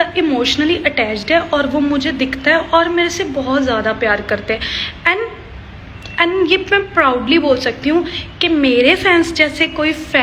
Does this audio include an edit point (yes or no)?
no